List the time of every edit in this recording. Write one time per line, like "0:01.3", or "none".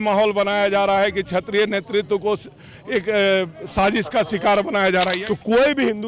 0:05.2